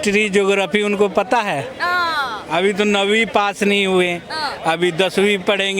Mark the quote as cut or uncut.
uncut